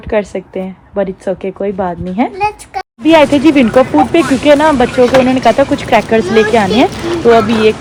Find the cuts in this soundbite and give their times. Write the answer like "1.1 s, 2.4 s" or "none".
none